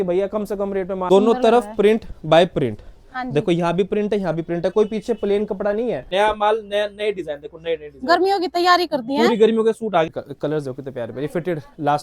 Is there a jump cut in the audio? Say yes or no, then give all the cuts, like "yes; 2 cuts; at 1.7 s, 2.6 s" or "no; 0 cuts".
yes; 3 cuts; at 0.9 s, 6.0 s, 10.1 s